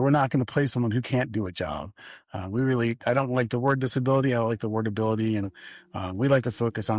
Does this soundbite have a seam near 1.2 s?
no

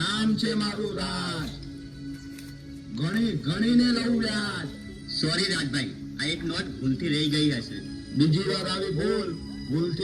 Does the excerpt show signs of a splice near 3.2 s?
no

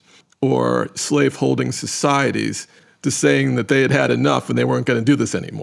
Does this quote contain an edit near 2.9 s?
no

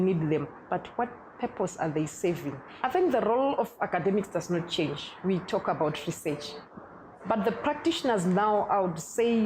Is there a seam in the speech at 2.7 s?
yes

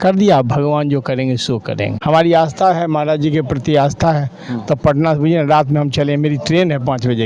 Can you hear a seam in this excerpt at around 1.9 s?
yes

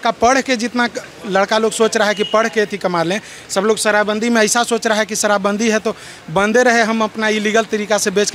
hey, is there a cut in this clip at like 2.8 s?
no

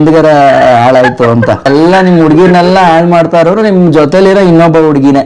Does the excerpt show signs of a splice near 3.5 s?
no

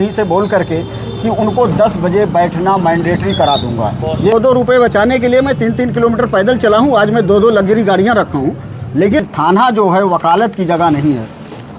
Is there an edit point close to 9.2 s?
yes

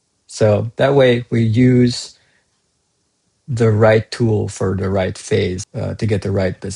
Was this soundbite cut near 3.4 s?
no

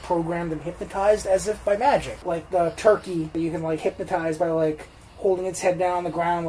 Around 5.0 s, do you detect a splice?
no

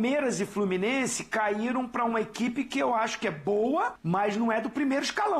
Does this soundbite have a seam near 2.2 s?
no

